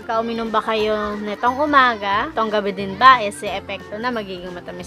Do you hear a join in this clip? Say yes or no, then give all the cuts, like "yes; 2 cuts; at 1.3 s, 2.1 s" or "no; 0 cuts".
yes; 1 cut; at 2.3 s